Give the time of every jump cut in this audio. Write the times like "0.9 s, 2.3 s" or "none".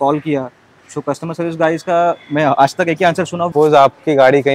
3.5 s